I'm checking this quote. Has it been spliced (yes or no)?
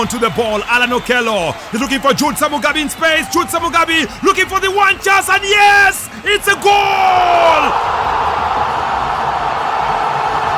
yes